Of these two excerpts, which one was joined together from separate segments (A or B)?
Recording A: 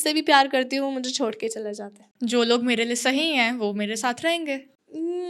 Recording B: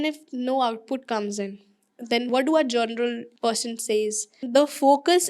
B